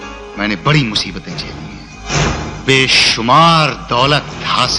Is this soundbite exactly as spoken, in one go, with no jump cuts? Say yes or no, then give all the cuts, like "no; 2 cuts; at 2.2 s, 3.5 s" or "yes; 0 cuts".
no; 1 cut; at 2.0 s